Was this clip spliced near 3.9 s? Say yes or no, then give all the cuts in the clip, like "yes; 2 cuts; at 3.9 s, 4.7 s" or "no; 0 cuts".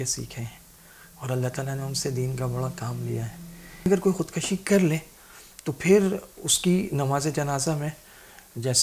yes; 1 cut; at 3.9 s